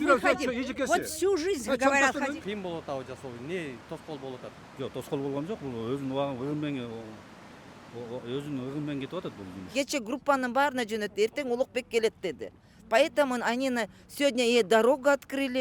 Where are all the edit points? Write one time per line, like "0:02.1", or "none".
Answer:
0:02.2
0:09.7